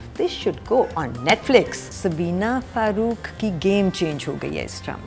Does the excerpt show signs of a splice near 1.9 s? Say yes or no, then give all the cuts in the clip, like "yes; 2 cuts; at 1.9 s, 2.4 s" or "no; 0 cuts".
yes; 1 cut; at 1.9 s